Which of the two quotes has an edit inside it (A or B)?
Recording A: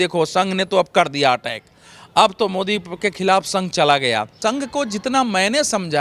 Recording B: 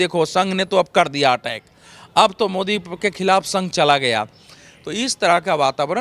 A